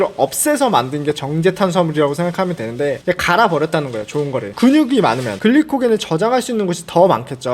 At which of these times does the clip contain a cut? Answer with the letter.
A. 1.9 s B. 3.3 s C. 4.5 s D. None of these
C